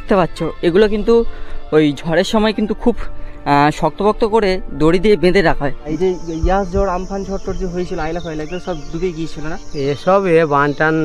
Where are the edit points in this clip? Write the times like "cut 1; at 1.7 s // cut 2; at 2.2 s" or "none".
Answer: cut 1; at 5.8 s